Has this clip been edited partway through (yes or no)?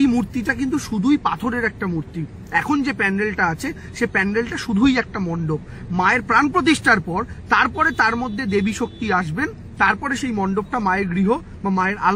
no